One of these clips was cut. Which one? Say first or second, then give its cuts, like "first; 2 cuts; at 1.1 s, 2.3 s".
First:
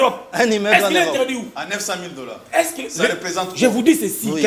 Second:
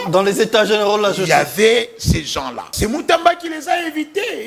second; 1 cut; at 2.7 s